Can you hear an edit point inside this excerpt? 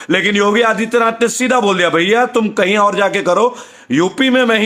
no; 0 cuts

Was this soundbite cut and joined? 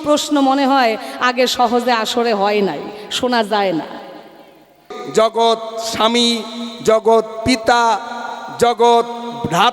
yes; 1 cut; at 4.9 s

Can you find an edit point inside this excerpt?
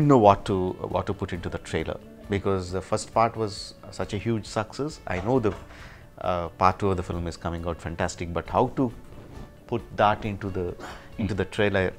no; 0 cuts

